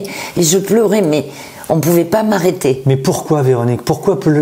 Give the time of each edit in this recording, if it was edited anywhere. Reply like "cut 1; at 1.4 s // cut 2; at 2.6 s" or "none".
none

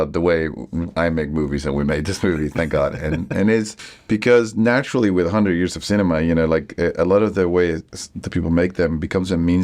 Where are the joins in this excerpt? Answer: none

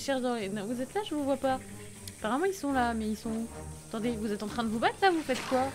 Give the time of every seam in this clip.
none

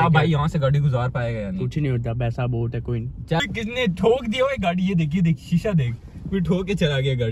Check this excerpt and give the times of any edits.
cut 1; at 3.4 s

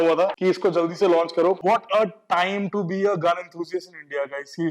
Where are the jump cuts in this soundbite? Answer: cut 1; at 1.6 s

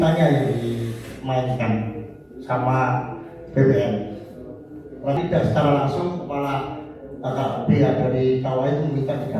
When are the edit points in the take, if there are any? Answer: cut 1; at 5.2 s

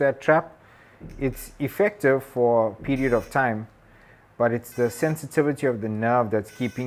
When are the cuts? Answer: none

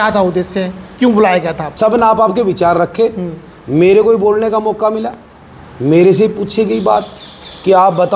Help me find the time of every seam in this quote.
cut 1; at 1.6 s

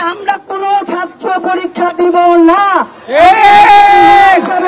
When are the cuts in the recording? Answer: none

